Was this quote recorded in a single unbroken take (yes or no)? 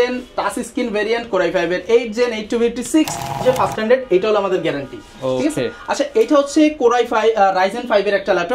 no